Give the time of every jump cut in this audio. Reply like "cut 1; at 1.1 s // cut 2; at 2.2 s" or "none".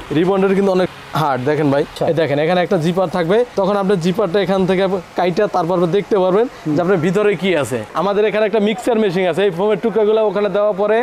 cut 1; at 1.9 s // cut 2; at 7.9 s